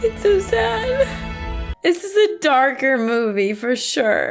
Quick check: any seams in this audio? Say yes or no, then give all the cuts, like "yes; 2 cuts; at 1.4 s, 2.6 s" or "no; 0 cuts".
yes; 1 cut; at 1.7 s